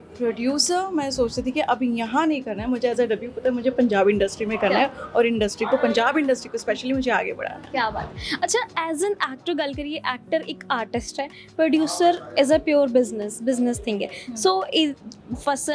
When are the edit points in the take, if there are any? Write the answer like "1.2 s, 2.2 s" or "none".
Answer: none